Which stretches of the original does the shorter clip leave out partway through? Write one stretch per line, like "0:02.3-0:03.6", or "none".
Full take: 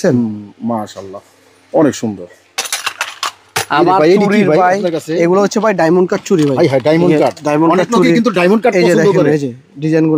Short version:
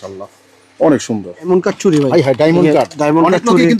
0:02.4-0:05.9